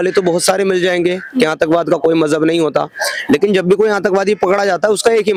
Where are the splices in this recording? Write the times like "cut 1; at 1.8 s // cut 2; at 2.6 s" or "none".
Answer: none